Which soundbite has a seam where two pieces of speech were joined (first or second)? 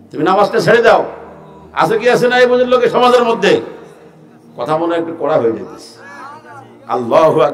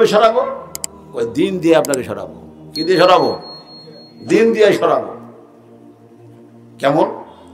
second